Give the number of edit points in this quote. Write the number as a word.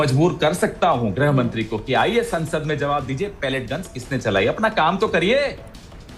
zero